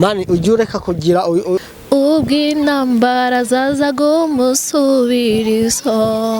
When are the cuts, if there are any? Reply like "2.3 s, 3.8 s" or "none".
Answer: 1.6 s